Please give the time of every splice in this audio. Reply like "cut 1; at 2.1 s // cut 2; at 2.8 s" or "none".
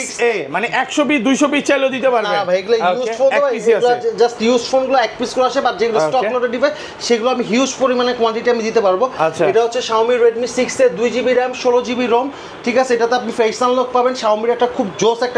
none